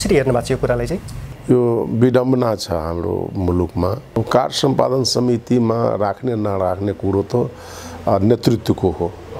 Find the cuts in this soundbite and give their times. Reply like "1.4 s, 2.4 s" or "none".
4.0 s